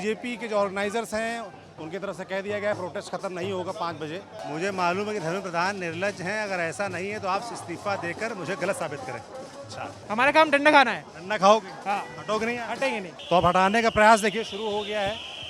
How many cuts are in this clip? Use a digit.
3